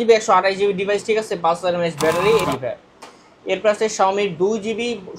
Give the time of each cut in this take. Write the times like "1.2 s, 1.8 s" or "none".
2.4 s